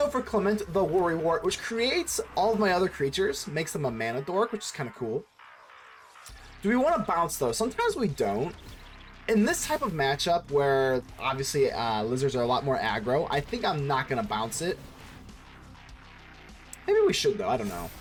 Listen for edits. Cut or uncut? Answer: uncut